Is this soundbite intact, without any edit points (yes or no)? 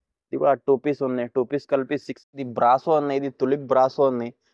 no